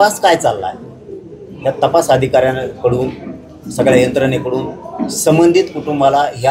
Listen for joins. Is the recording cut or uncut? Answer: uncut